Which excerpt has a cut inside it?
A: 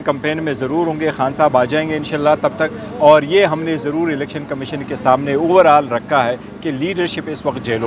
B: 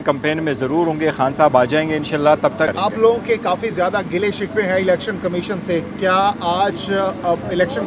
B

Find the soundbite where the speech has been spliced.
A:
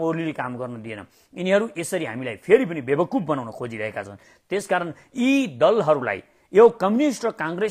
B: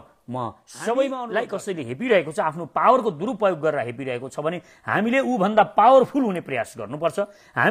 B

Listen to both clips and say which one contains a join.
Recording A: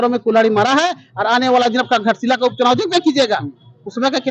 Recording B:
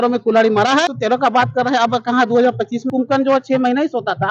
B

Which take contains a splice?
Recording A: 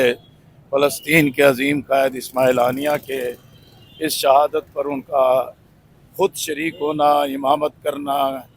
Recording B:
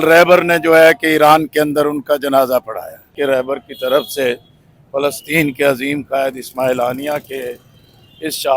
B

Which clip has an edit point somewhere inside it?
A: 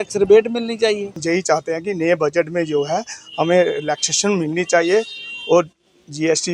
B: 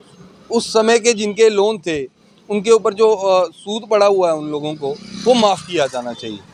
A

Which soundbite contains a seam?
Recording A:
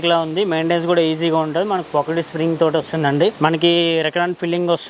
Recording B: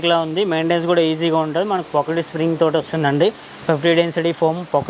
A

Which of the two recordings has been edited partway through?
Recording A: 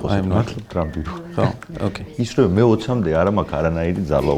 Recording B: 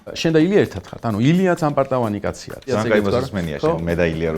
B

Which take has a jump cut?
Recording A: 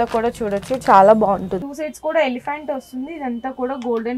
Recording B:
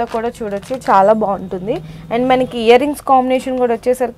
A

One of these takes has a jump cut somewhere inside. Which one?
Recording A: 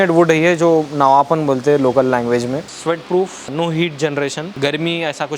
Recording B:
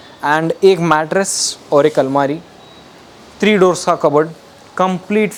A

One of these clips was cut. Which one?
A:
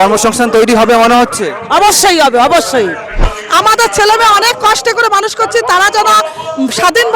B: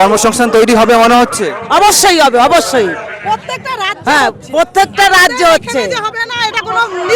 A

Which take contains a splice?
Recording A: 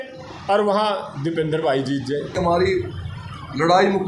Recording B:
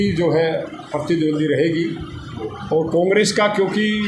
A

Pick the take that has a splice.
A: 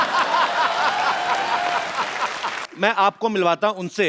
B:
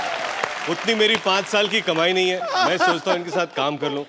A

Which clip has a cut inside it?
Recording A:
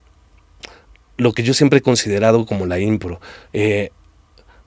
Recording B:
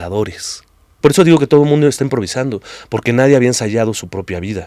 B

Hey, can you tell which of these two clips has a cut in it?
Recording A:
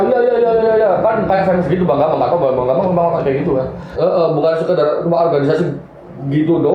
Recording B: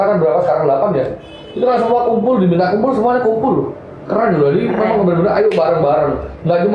A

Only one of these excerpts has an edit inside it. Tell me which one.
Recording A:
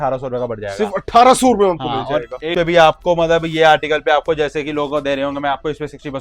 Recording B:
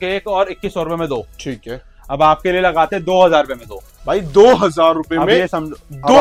A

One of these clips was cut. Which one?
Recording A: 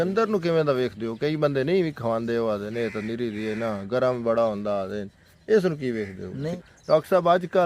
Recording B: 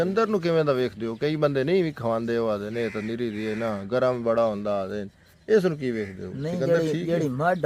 A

